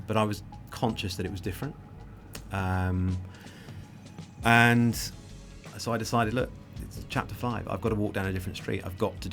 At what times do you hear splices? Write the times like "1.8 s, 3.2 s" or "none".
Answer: 5.8 s